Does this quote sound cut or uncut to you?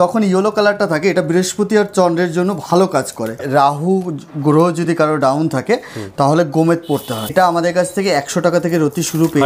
cut